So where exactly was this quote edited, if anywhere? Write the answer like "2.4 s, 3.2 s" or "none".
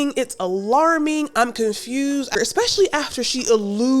2.4 s